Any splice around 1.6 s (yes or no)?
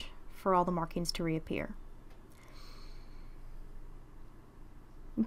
yes